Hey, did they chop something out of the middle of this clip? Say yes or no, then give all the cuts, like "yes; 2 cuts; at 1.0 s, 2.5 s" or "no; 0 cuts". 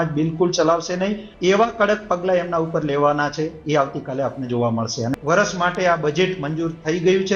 yes; 2 cuts; at 1.3 s, 5.1 s